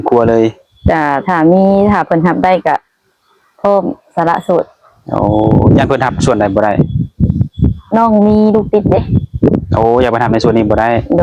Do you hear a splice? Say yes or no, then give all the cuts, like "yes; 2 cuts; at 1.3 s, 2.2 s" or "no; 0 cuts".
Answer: no; 0 cuts